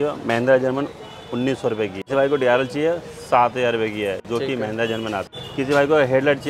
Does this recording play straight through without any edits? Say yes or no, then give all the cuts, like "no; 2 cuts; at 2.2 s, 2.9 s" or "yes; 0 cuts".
no; 2 cuts; at 2.1 s, 5.3 s